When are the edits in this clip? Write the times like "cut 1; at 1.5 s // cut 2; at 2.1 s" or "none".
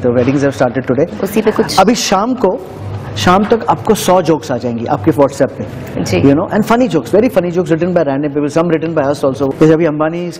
cut 1; at 9.5 s